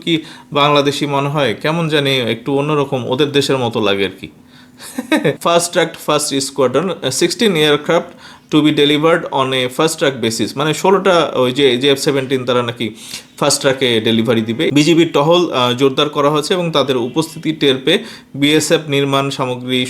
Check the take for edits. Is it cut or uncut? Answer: cut